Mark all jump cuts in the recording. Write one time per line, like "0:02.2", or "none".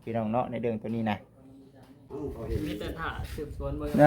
0:02.1